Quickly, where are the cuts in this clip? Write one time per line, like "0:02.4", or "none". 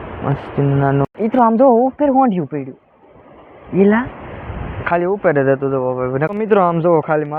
0:01.0
0:06.3